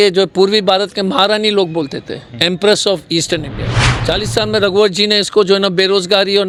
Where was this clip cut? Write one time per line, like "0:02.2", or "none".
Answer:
none